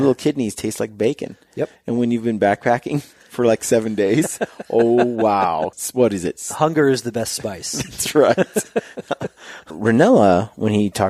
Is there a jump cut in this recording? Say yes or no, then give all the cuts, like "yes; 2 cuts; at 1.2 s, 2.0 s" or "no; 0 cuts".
yes; 2 cuts; at 5.8 s, 9.7 s